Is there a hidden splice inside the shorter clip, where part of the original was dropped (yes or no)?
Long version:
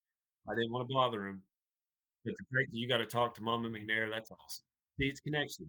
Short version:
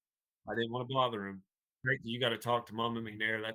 yes